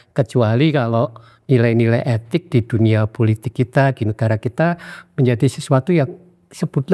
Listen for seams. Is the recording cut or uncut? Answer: uncut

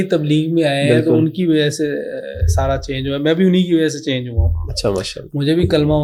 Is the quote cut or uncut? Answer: uncut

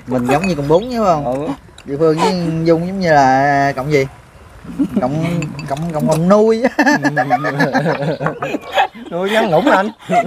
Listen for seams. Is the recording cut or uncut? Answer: uncut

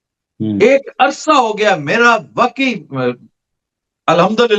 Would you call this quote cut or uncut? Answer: uncut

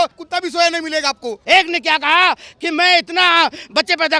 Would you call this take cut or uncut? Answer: cut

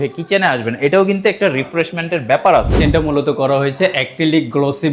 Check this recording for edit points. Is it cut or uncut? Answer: cut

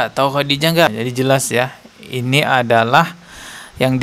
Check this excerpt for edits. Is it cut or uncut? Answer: cut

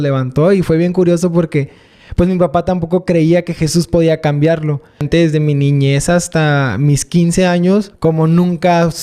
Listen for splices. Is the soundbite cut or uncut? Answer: cut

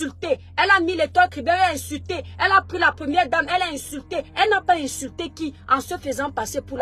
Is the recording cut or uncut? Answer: uncut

